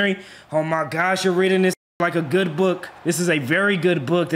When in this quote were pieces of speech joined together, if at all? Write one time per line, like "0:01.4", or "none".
0:02.9